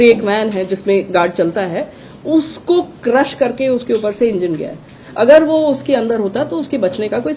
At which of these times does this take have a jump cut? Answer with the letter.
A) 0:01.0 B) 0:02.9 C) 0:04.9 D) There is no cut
D